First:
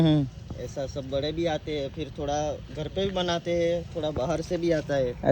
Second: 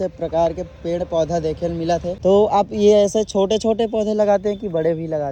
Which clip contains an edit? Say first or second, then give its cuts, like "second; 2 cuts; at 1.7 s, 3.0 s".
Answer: second; 1 cut; at 2.1 s